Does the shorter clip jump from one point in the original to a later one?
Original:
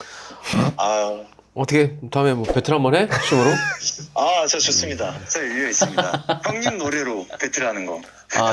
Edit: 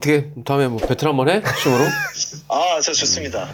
no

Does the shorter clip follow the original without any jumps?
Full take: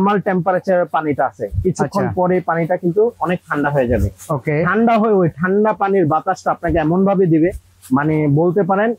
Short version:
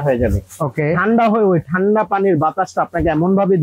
yes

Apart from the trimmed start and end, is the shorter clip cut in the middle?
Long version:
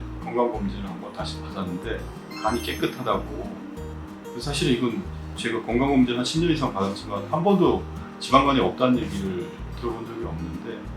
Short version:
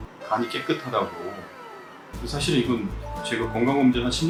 no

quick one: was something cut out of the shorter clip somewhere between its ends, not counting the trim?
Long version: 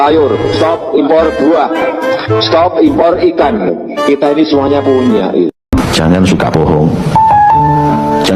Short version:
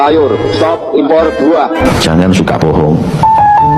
yes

